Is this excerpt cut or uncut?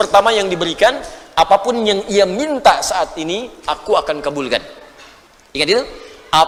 uncut